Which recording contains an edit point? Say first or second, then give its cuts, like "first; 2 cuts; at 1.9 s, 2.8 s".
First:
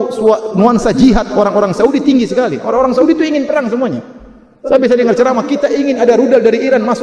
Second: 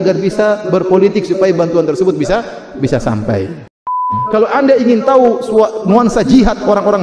second; 1 cut; at 4.1 s